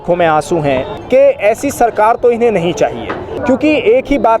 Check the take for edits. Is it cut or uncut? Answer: cut